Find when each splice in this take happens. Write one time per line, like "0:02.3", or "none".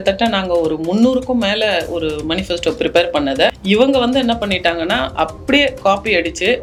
none